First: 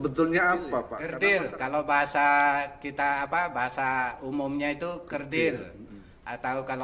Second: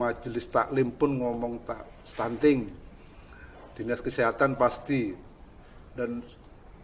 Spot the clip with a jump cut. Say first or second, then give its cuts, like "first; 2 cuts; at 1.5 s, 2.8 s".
first; 1 cut; at 1.0 s